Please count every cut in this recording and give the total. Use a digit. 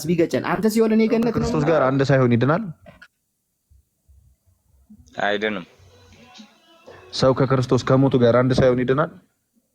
1